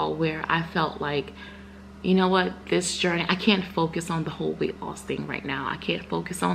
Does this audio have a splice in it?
no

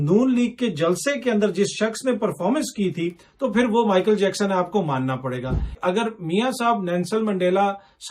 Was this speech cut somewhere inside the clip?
yes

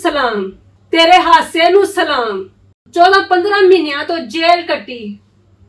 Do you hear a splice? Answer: yes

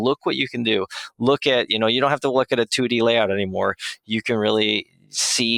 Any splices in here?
no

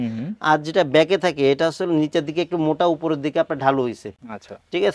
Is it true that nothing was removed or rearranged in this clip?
yes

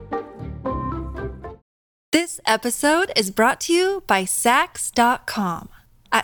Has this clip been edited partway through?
yes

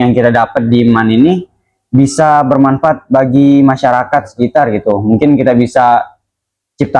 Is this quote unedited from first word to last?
yes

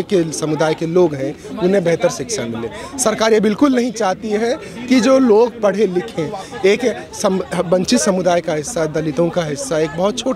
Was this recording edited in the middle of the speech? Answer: no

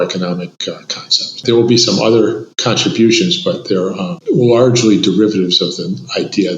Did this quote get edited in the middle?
yes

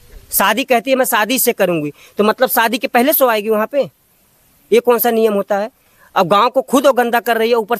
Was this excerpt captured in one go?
yes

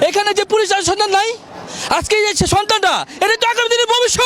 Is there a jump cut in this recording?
no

